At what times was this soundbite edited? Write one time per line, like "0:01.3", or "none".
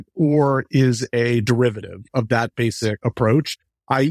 0:02.0
0:03.0